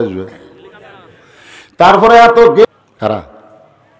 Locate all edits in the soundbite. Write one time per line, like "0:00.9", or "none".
0:02.6